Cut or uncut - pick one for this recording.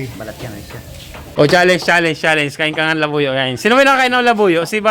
cut